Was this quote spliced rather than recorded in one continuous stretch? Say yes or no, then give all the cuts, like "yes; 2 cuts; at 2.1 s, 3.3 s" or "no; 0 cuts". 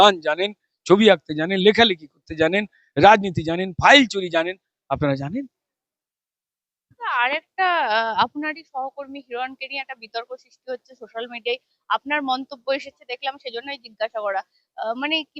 no; 0 cuts